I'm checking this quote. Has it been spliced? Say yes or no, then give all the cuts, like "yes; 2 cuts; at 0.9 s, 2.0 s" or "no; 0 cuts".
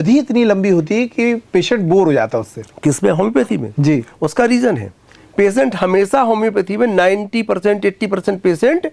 no; 0 cuts